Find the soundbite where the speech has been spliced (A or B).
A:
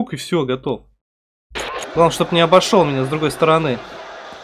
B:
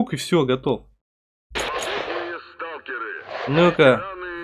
A